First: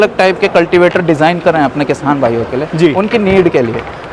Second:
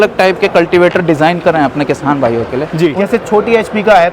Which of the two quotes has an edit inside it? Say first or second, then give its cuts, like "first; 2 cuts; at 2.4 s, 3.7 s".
second; 1 cut; at 3.0 s